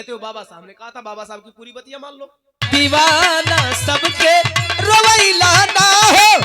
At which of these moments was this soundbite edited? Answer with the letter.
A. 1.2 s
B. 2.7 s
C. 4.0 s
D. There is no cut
B